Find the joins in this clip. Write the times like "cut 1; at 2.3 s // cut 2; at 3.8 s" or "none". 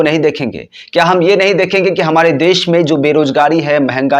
none